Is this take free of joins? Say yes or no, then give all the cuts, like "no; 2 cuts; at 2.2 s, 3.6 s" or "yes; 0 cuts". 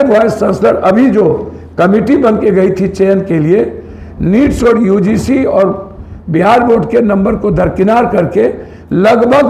yes; 0 cuts